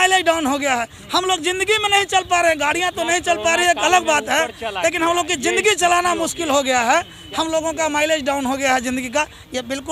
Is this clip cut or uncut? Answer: uncut